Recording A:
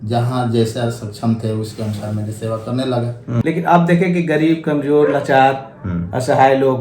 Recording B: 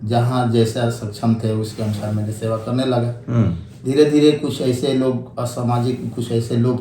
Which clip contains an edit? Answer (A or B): A